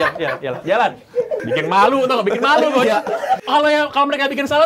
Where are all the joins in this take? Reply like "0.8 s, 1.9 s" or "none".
1.4 s, 3.4 s